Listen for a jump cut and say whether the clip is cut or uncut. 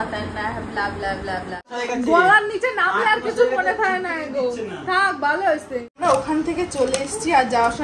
cut